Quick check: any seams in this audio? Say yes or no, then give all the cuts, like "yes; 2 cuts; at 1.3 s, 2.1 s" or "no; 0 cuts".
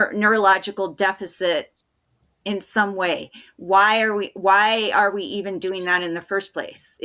no; 0 cuts